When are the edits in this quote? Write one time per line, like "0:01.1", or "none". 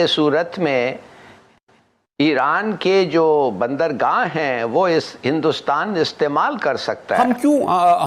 0:07.2